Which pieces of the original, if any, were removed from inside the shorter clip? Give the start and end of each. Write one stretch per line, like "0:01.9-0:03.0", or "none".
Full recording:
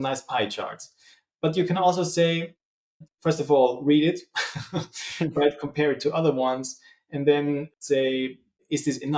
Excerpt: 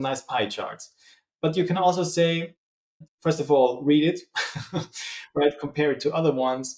none